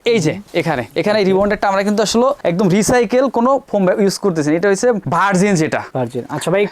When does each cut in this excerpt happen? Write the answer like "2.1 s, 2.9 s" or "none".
none